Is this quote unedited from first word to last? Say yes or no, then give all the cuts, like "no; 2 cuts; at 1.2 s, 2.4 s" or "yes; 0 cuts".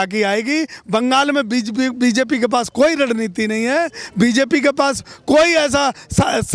yes; 0 cuts